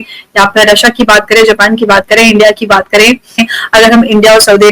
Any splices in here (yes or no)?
yes